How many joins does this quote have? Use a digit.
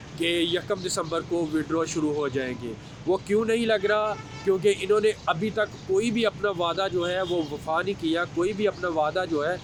0